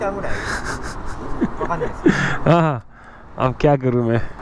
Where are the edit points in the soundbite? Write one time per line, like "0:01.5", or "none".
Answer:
none